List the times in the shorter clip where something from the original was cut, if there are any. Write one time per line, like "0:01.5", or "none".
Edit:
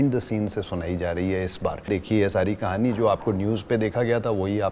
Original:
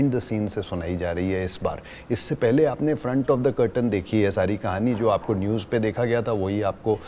0:01.9